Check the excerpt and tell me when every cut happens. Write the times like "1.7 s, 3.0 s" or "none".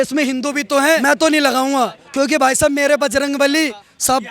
1.0 s